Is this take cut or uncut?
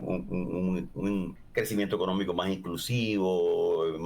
cut